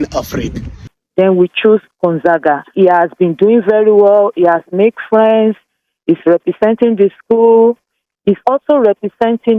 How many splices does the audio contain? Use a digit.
1